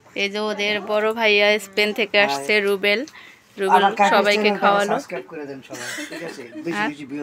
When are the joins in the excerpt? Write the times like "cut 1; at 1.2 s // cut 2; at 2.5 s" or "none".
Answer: cut 1; at 6.1 s